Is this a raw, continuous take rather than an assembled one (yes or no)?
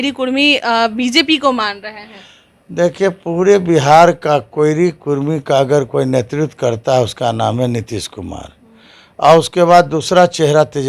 yes